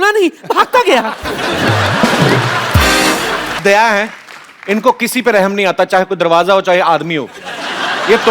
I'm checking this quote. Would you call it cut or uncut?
cut